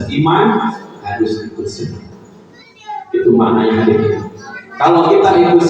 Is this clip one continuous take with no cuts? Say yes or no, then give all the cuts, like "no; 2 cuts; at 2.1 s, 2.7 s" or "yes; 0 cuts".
yes; 0 cuts